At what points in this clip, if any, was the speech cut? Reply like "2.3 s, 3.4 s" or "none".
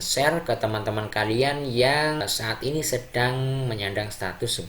2.2 s